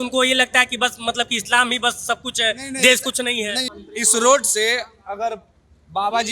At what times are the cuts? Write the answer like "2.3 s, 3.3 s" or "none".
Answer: 3.7 s